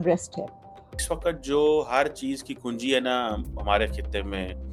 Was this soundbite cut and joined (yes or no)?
yes